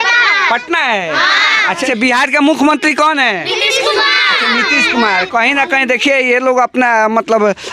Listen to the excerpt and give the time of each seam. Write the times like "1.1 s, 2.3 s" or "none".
none